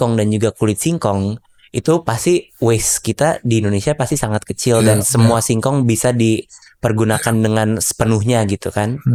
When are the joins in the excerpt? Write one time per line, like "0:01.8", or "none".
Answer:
none